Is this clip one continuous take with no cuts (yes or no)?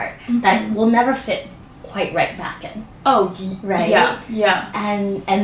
yes